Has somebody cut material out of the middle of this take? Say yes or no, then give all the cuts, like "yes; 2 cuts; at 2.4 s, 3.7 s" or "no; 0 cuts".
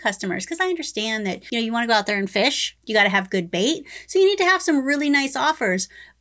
yes; 1 cut; at 1.4 s